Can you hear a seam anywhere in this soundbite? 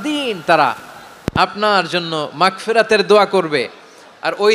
no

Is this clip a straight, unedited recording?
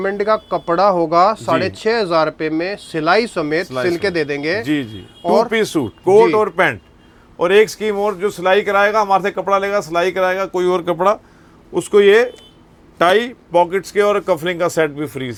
yes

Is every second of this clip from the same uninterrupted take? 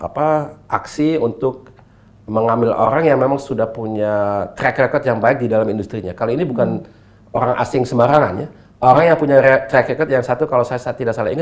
yes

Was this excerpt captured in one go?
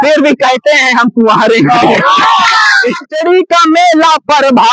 no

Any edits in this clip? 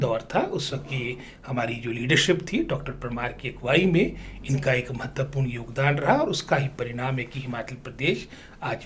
no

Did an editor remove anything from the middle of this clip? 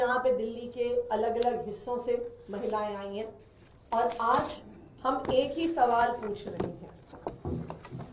no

